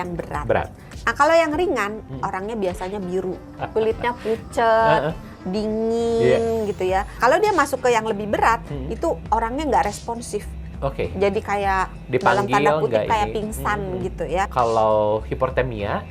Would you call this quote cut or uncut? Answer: cut